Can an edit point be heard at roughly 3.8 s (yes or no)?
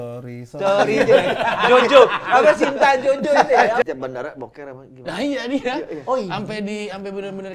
yes